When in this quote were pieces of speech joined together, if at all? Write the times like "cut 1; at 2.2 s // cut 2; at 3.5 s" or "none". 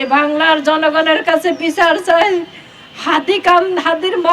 none